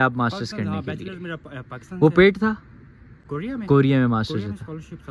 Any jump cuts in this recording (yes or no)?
no